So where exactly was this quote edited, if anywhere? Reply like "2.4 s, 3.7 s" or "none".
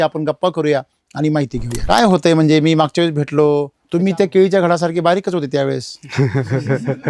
1.8 s